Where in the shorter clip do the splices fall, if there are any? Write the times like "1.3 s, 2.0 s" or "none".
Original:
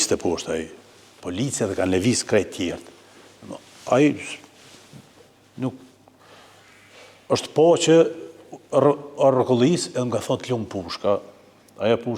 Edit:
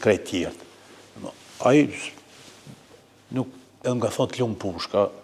3.8 s